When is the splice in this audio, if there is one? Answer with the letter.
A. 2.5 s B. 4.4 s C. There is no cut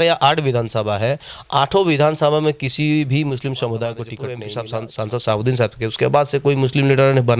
B